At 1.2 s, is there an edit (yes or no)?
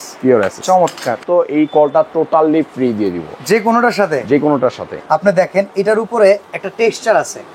yes